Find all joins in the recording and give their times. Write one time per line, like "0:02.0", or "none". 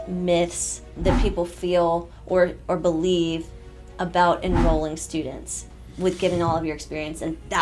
0:00.9